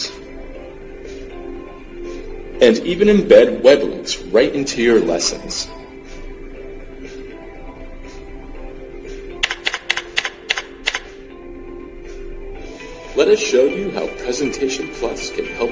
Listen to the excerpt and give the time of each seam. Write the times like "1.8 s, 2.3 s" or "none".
11.7 s